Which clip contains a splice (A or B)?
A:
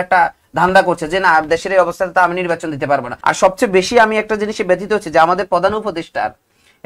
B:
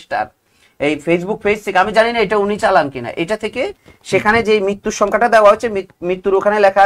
A